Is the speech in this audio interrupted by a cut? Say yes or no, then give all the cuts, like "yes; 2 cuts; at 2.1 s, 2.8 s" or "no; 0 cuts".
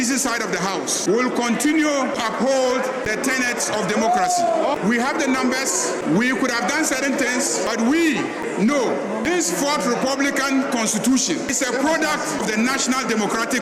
yes; 9 cuts; at 1.0 s, 2.2 s, 3.1 s, 4.6 s, 6.0 s, 7.7 s, 9.3 s, 11.5 s, 12.4 s